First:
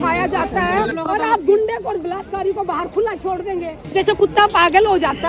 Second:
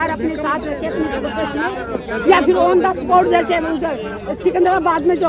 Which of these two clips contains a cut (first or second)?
first